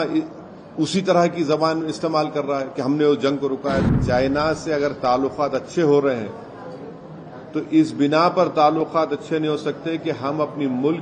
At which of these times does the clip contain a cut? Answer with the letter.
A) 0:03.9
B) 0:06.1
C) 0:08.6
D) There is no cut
A